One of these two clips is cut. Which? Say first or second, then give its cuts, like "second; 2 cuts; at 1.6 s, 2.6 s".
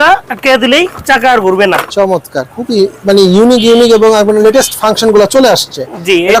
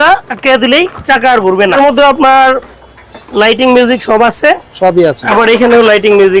second; 1 cut; at 1.7 s